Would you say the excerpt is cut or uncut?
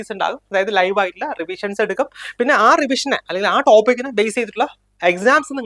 uncut